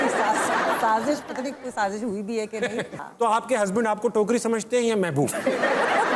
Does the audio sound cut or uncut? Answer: cut